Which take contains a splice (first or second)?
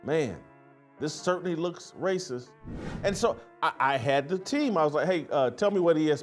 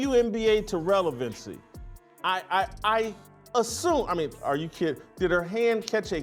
second